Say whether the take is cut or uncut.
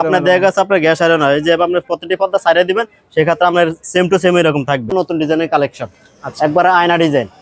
cut